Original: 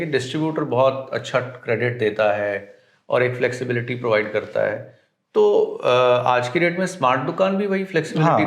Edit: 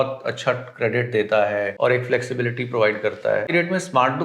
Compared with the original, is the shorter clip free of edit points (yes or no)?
no